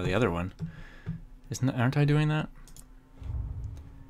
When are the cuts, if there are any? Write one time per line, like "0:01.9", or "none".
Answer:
0:02.3